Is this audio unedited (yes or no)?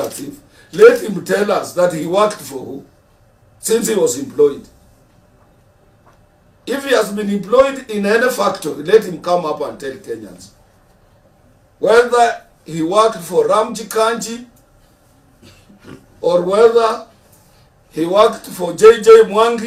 yes